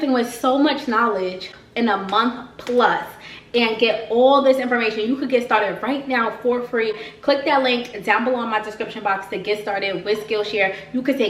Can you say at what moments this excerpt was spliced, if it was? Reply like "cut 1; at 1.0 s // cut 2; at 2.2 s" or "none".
none